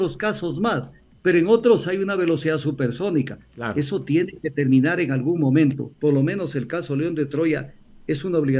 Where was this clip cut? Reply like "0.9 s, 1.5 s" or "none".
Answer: 5.9 s